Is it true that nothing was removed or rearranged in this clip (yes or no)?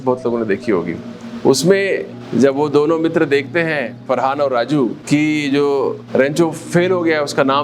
no